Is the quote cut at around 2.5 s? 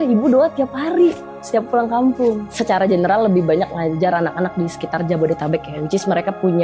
yes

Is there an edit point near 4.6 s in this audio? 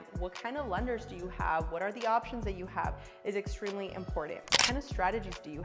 yes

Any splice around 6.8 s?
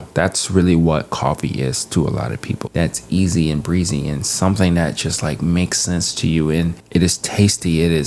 yes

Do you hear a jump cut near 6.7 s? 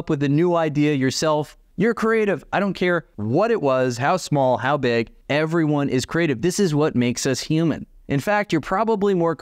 no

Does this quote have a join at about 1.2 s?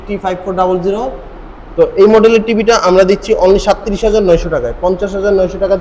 no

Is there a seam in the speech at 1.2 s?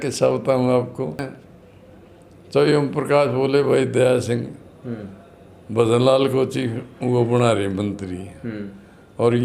yes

